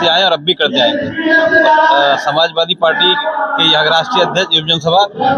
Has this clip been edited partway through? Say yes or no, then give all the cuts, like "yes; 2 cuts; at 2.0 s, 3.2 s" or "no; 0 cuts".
no; 0 cuts